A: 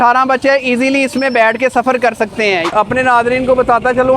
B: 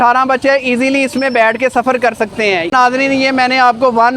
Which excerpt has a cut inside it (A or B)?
A